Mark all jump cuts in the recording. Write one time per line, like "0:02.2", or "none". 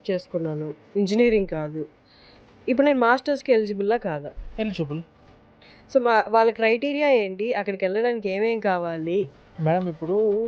0:09.4